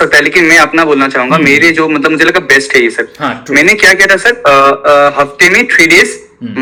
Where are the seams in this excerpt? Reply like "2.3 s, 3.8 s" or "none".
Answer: none